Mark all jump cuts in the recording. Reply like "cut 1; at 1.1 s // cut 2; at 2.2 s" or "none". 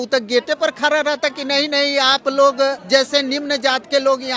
none